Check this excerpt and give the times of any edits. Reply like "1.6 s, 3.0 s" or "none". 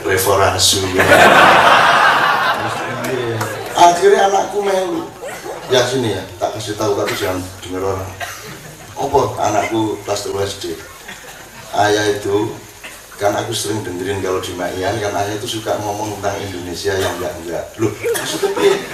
3.7 s